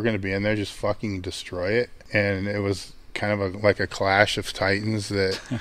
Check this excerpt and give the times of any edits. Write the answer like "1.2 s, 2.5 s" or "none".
2.0 s